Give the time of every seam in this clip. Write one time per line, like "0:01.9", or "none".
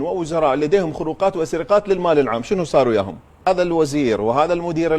0:03.5